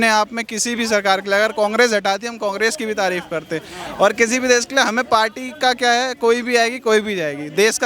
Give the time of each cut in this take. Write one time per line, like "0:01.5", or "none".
none